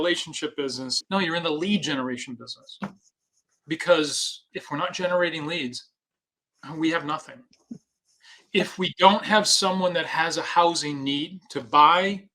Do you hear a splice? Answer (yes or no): yes